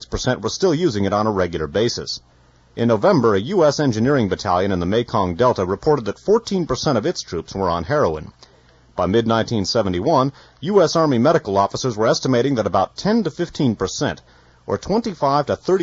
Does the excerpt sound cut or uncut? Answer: cut